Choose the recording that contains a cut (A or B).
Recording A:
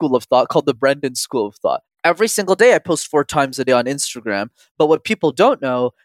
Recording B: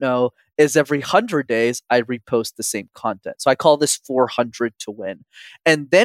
A